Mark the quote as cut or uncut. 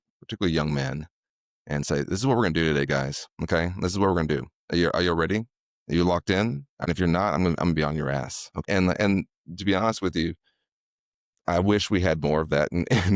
cut